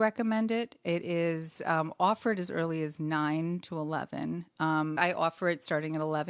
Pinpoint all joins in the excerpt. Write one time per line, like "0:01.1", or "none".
0:05.0